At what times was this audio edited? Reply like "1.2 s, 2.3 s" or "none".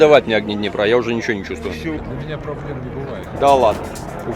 2.0 s, 3.3 s